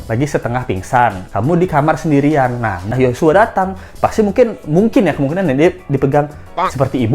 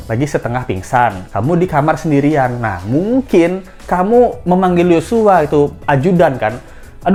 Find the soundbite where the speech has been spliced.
first; 1 cut; at 2.8 s

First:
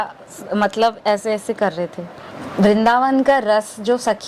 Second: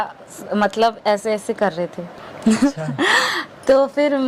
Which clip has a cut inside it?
first; 1 cut; at 2.3 s

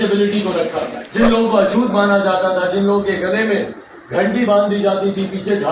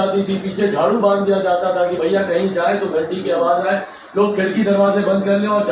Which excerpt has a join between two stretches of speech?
first; 1 cut; at 1.0 s

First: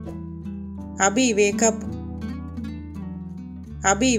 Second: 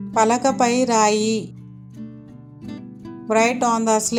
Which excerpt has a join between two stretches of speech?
first; 2 cuts; at 1.8 s, 3.4 s

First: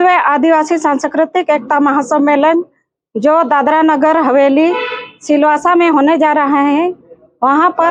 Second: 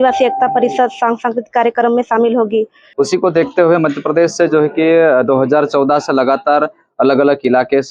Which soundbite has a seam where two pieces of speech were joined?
second; 1 cut; at 2.8 s

